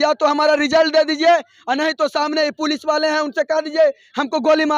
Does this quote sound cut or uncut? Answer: uncut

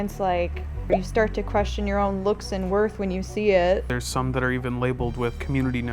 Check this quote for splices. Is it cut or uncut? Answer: uncut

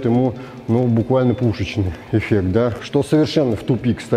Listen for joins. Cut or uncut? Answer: cut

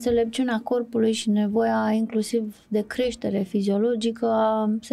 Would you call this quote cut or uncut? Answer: uncut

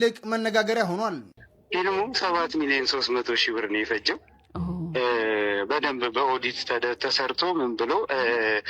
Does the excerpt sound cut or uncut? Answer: cut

